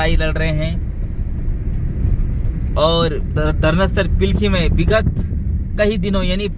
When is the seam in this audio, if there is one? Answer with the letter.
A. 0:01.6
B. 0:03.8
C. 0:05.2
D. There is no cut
D